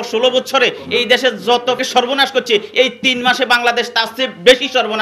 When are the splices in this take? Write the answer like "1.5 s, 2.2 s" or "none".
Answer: 1.8 s